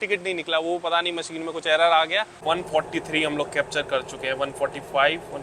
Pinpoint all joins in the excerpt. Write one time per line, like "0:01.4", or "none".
0:02.4